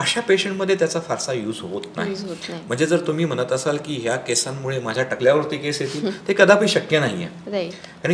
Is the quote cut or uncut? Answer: uncut